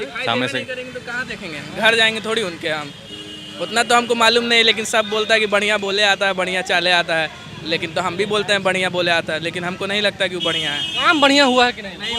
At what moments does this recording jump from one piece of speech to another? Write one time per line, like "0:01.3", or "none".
none

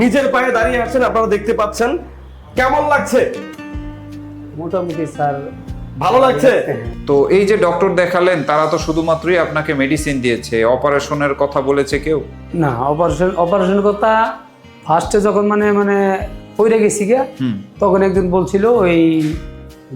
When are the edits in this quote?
0:06.9

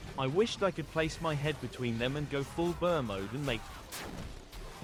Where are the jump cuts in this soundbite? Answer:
none

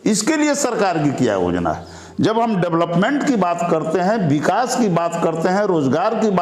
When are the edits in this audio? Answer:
none

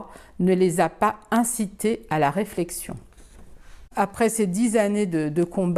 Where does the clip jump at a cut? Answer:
0:03.8

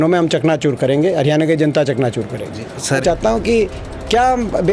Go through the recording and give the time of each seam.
0:03.0

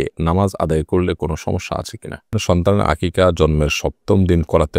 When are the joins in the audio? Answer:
0:02.3

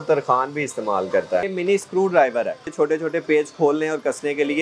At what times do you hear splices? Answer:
0:01.4
0:02.7

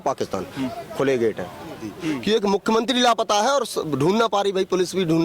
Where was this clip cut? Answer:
0:01.9

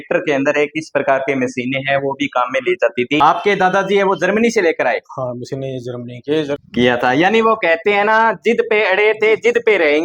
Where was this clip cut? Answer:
0:03.2
0:06.6

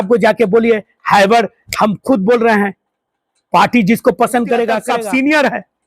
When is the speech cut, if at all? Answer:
0:04.8

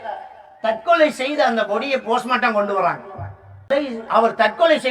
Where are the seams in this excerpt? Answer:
0:03.7

